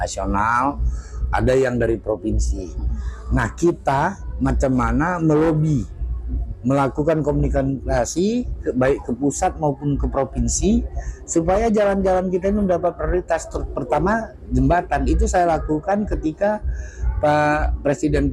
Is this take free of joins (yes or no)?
yes